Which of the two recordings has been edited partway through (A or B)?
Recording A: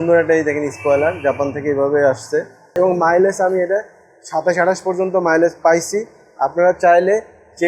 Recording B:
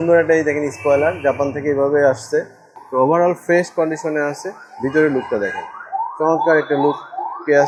A